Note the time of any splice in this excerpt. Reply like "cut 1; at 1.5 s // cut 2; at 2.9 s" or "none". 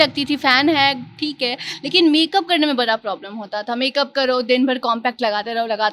none